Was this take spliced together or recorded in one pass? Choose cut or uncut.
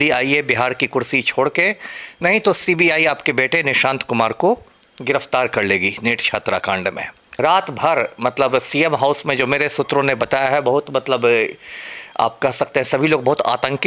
cut